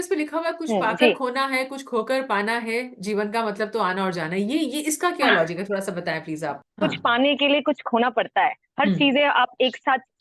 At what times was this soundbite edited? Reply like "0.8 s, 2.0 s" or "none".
6.5 s

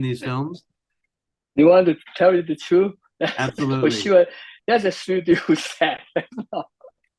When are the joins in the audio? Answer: 5.0 s

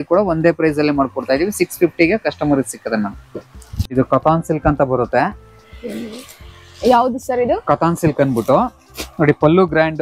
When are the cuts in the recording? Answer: none

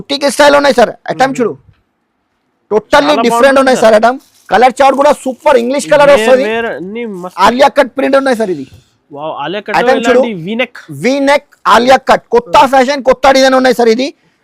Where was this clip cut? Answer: 7.3 s

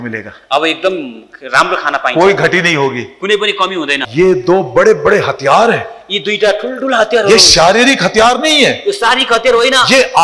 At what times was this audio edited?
4.0 s

